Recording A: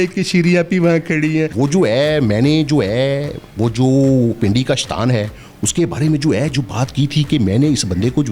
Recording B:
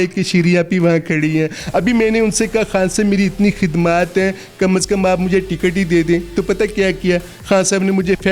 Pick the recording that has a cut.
A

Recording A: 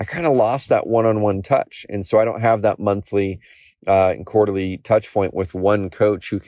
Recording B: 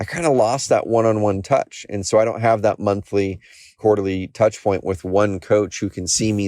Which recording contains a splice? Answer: B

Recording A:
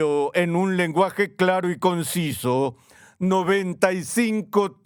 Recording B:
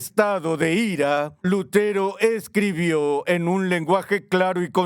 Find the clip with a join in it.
B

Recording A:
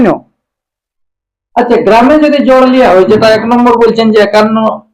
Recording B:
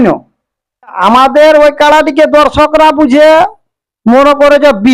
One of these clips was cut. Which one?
B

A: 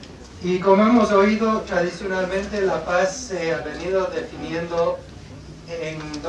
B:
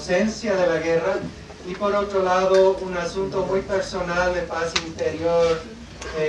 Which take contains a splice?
A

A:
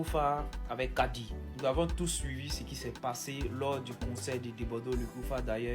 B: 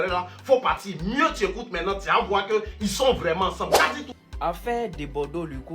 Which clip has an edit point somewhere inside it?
B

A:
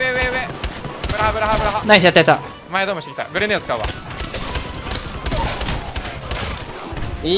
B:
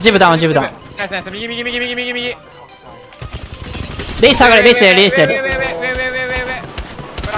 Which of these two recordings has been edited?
A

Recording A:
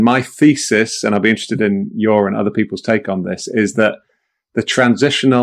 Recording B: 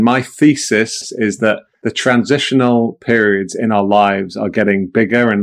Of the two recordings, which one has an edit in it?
B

